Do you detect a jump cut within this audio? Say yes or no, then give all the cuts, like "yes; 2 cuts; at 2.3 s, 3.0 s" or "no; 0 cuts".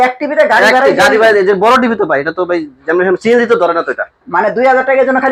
no; 0 cuts